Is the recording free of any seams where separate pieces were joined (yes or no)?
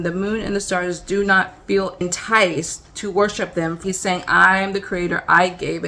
no